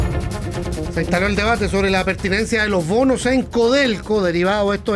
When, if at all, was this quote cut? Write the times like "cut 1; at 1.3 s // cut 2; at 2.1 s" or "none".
cut 1; at 1.1 s